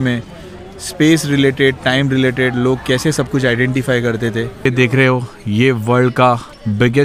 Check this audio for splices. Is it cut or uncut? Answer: cut